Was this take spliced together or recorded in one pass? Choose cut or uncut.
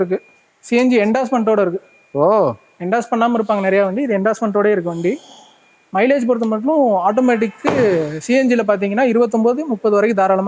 uncut